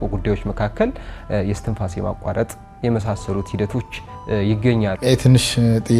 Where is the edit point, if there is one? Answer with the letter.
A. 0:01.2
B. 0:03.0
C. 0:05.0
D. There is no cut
C